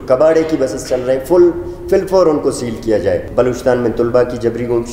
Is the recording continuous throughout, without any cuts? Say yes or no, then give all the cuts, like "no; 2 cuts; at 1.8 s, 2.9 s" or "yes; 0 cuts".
no; 1 cut; at 3.2 s